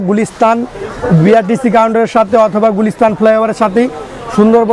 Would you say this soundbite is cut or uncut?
uncut